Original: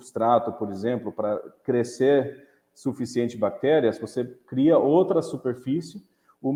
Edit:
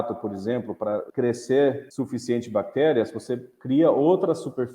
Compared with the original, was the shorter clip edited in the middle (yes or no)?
yes